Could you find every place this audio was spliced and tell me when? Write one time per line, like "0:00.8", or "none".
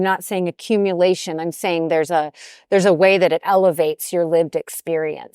none